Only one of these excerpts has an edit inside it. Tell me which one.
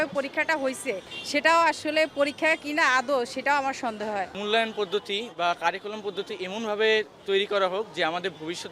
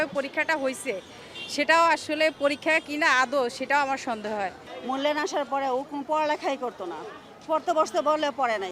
first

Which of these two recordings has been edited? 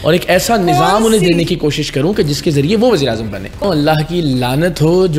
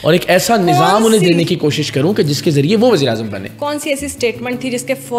first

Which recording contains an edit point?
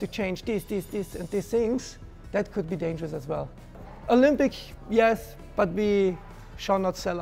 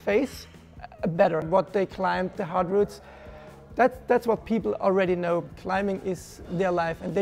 second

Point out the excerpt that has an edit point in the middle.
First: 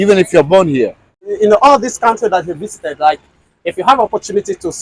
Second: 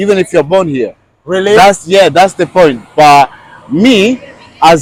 first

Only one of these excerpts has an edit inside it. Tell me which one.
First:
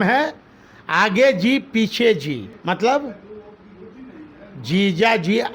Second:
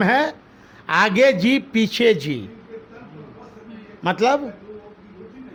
first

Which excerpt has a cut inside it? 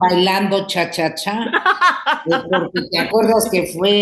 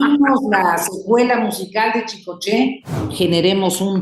second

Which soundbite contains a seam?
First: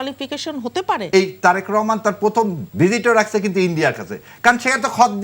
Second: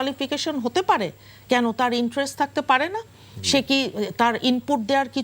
first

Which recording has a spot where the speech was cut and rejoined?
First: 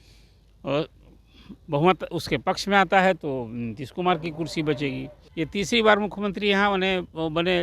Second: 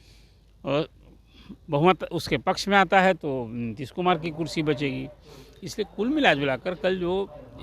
first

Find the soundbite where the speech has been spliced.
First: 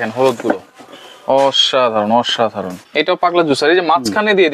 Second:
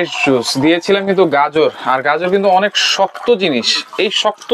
first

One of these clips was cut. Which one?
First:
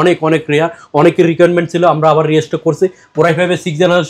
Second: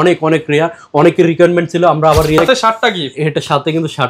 second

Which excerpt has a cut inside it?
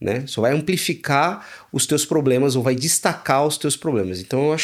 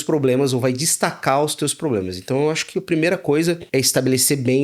second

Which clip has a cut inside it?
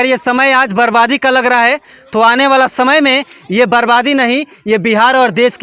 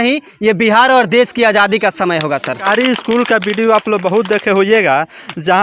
second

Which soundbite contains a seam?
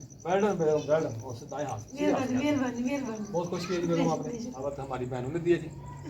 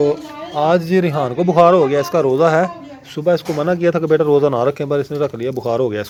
first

